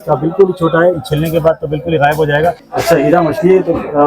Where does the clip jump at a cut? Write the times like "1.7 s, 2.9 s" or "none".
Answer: 2.6 s